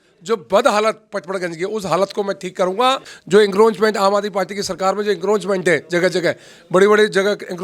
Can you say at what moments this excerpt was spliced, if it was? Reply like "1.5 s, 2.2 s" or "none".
3.1 s